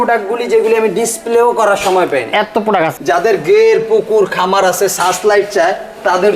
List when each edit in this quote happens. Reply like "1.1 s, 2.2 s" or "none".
3.0 s